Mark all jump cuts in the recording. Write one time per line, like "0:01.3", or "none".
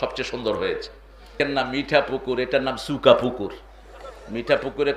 0:01.4